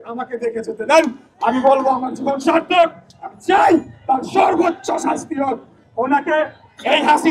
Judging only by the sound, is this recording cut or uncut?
uncut